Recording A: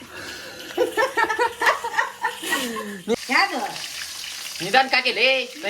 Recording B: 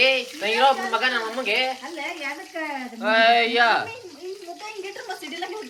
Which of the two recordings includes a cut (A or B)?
A